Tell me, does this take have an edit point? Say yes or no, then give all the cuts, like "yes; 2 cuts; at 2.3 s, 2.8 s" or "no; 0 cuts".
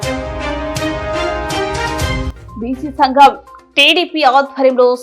yes; 1 cut; at 2.2 s